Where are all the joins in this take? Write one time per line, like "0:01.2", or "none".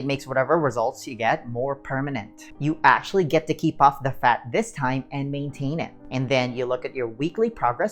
0:02.4
0:06.0